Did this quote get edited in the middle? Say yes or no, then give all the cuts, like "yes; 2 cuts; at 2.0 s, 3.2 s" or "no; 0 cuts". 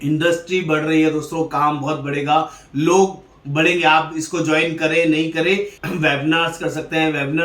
yes; 1 cut; at 5.8 s